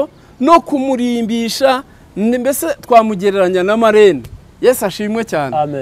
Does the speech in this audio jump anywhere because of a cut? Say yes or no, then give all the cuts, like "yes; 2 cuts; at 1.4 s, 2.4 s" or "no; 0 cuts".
no; 0 cuts